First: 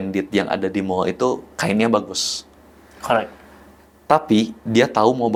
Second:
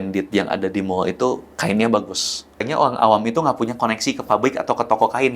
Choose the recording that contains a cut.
second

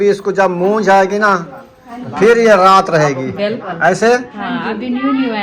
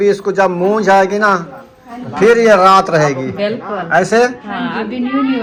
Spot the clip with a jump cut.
first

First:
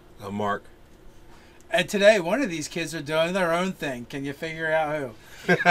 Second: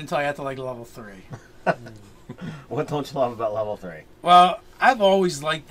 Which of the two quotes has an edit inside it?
second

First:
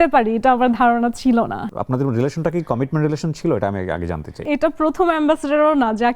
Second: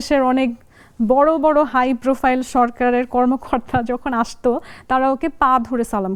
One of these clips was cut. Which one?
first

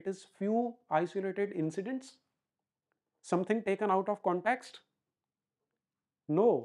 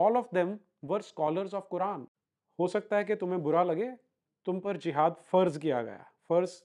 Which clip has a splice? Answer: second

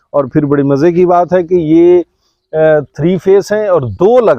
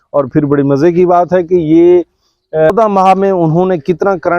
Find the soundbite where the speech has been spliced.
second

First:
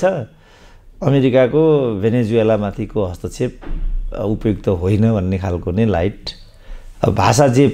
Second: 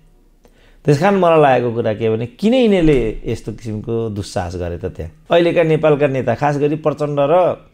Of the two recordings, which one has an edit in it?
second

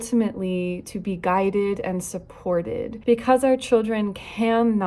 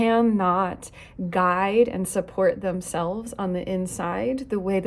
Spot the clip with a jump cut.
first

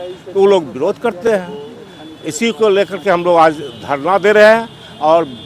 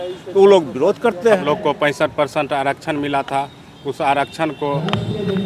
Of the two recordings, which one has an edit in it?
second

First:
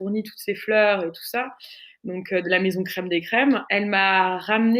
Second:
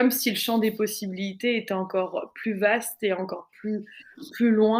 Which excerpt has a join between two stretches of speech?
first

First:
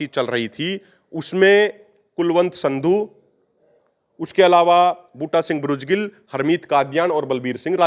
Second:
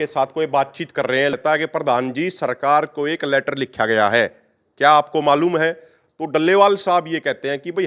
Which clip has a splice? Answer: second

